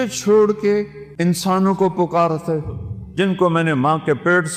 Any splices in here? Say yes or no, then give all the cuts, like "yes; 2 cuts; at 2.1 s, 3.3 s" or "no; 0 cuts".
yes; 1 cut; at 1.0 s